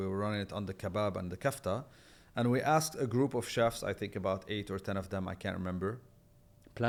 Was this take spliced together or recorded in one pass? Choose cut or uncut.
uncut